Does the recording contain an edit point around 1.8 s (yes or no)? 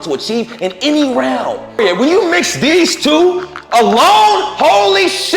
yes